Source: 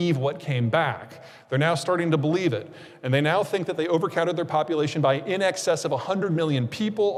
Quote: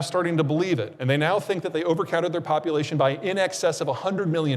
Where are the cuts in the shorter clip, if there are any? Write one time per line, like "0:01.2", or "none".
0:00.9

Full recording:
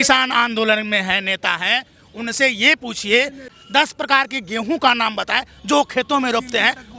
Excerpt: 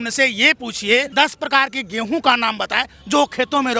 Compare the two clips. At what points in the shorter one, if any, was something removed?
0:01.1

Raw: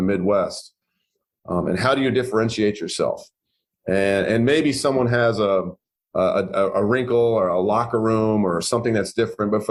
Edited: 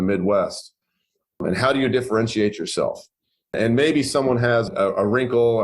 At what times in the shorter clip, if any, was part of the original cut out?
0:01.4
0:03.5
0:04.7

